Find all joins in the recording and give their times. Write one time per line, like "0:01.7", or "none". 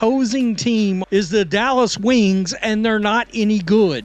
0:01.0

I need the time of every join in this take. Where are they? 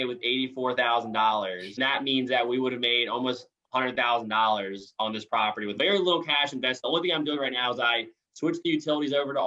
0:01.7
0:05.7

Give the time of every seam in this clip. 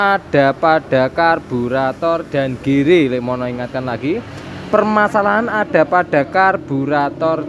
none

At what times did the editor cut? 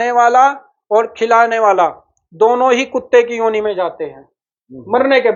none

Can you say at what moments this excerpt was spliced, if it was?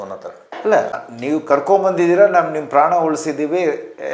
0:00.9

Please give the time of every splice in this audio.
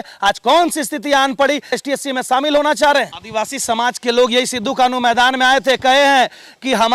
0:01.8
0:03.2

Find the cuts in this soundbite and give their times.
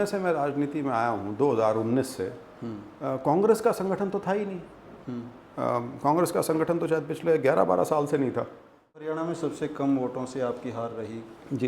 0:09.0

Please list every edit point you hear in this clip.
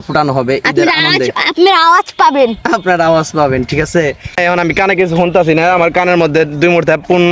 0:04.4

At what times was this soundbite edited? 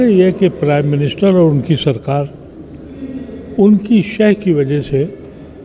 none

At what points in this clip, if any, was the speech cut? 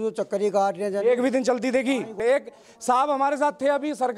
0:02.1

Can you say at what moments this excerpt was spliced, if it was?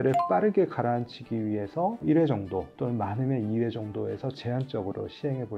none

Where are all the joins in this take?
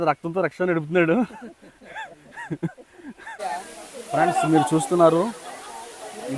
0:03.3

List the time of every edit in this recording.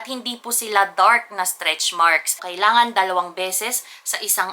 0:02.4

